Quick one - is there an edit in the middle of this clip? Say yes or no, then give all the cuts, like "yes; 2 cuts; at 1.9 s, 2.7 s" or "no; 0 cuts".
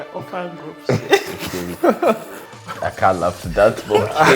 no; 0 cuts